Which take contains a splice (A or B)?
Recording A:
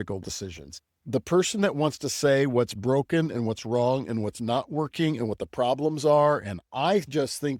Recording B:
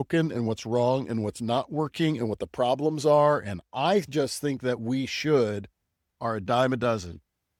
A